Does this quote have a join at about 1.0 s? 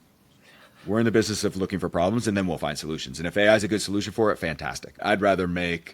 no; 1 cut; at 5.0 s

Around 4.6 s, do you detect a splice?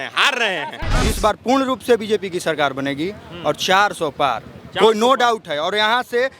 no; 1 cut; at 1.0 s

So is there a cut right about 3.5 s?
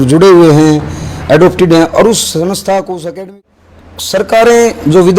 yes; 1 cut; at 3.5 s

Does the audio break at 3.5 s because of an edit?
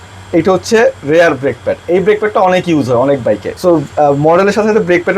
yes; 1 cut; at 3.5 s

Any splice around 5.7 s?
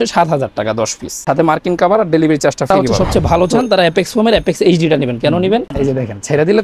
yes; 2 cuts; at 2.7 s, 5.7 s

